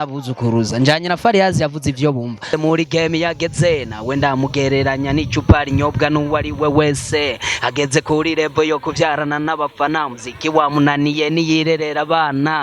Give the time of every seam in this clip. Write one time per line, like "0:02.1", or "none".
0:02.5